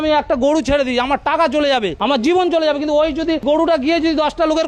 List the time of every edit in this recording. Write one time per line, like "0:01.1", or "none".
0:01.9
0:03.4